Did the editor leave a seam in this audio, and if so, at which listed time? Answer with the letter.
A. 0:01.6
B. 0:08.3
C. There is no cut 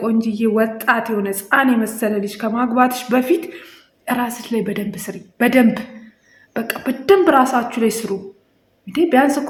C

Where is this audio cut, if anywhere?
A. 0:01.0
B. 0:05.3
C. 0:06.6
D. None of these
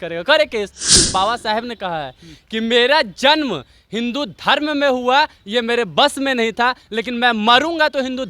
A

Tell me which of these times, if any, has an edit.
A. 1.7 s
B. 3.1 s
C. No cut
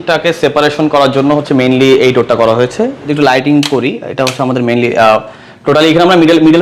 B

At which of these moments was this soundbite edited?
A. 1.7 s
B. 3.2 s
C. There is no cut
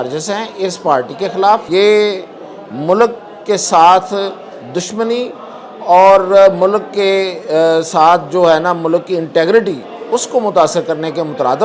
A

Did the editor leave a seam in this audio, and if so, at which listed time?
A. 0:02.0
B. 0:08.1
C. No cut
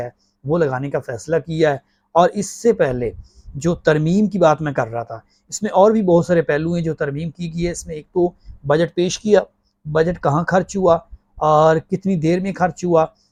C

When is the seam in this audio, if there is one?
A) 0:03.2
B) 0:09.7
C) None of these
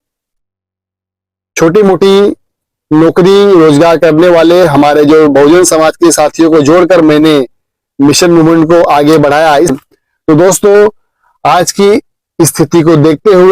B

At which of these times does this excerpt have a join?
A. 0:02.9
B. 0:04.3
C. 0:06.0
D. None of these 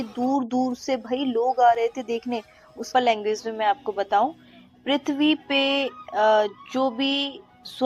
A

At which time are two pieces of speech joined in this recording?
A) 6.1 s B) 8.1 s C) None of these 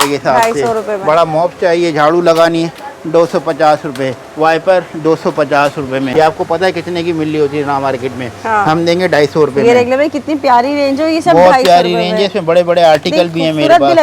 A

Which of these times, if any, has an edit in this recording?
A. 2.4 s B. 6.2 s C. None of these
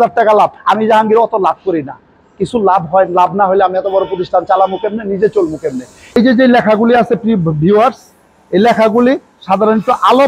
B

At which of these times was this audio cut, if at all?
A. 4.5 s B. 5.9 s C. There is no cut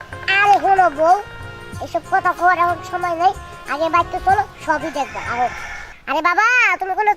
B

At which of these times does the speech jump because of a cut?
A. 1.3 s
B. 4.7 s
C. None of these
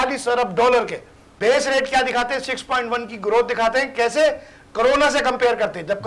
A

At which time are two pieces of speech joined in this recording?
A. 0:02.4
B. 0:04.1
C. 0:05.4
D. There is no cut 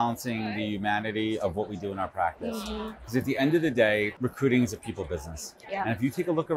B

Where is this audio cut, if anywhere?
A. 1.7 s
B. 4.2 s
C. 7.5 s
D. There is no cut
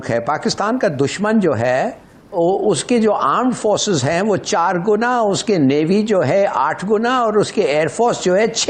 D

